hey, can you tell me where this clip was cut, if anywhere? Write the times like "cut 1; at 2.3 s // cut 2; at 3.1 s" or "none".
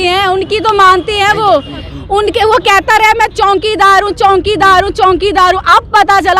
cut 1; at 1.9 s